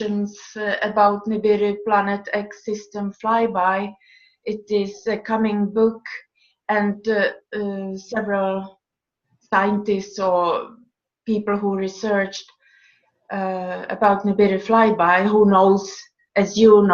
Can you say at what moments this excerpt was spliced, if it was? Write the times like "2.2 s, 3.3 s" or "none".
10.7 s

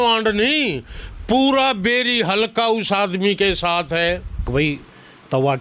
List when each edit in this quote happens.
4.4 s

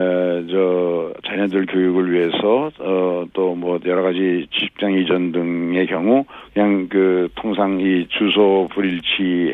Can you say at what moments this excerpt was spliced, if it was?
1.8 s

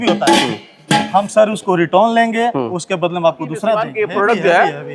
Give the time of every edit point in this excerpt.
3.9 s

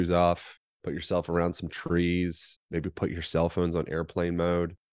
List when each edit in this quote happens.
none

